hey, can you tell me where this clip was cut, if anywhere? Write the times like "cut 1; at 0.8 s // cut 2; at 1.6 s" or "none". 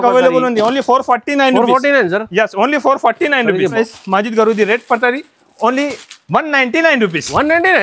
cut 1; at 3.8 s